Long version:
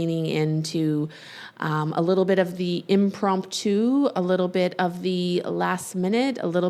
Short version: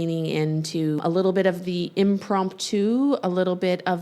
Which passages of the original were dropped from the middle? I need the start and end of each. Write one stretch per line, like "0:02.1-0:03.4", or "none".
0:01.0-0:01.9